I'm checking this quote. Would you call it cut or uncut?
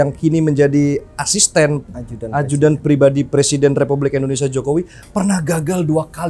uncut